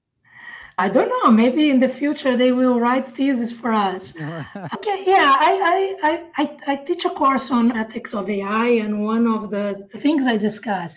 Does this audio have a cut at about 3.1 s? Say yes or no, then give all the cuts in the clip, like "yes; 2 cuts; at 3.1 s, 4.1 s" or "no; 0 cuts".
no; 4 cuts; at 0.8 s, 4.7 s, 7.8 s, 10.0 s